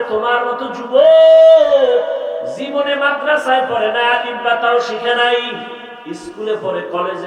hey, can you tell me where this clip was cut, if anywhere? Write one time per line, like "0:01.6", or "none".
0:02.6
0:05.9